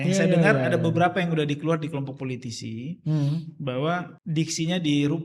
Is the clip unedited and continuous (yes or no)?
no